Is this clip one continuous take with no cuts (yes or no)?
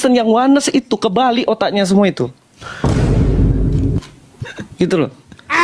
yes